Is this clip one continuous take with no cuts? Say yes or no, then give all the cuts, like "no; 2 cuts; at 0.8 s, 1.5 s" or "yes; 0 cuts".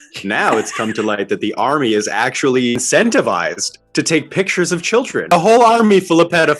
no; 2 cuts; at 2.7 s, 5.3 s